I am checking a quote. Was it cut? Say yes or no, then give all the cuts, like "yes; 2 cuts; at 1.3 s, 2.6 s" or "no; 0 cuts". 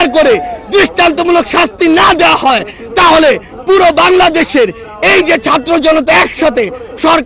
no; 0 cuts